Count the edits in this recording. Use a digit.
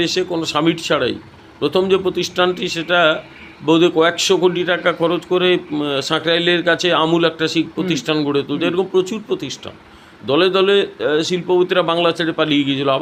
0